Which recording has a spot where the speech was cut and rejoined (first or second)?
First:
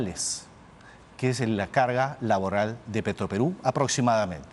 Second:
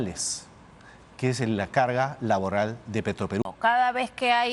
second